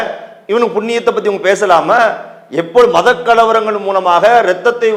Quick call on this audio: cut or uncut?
uncut